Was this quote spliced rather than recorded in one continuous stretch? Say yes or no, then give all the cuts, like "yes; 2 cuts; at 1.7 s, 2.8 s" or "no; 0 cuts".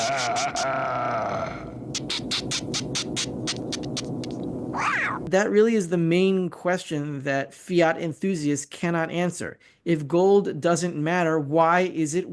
yes; 1 cut; at 5.2 s